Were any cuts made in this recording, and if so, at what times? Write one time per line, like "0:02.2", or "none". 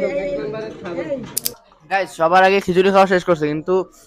0:01.9